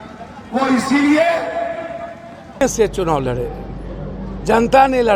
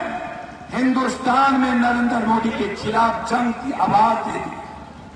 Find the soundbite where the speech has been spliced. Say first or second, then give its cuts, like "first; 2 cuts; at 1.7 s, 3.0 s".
first; 1 cut; at 2.6 s